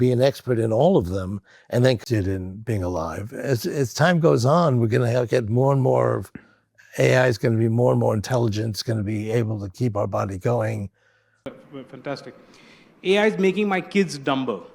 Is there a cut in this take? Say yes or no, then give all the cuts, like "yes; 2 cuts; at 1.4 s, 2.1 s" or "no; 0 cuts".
yes; 2 cuts; at 2.0 s, 11.4 s